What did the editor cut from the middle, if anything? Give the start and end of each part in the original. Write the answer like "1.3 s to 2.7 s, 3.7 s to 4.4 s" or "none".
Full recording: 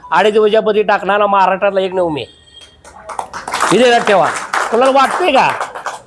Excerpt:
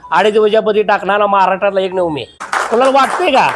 2.5 s to 4.5 s